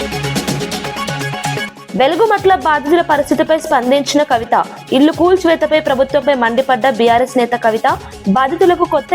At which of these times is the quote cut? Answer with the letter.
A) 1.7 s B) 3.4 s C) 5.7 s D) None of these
A